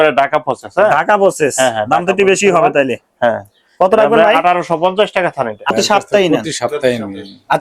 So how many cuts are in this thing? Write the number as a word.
one